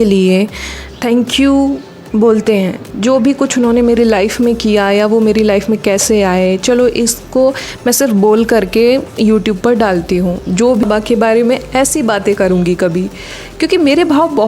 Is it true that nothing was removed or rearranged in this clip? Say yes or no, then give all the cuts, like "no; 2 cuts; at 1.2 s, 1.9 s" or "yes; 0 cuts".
no; 1 cut; at 10.8 s